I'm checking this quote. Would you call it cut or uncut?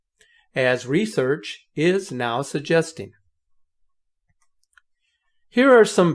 cut